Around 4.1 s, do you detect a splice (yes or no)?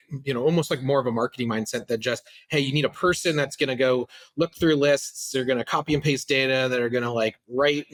no